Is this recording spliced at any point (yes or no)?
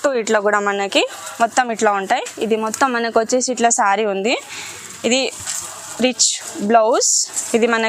no